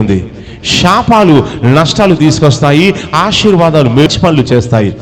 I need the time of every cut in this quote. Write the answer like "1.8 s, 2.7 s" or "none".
4.1 s